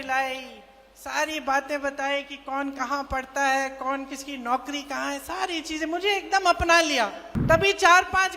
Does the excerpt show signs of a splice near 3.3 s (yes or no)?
no